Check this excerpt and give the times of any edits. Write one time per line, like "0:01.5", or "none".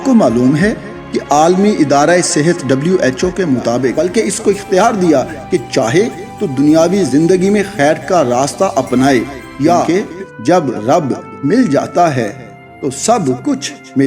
0:03.9
0:09.9